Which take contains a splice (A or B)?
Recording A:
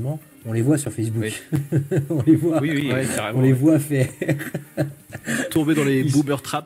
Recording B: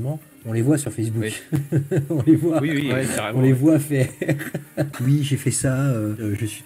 B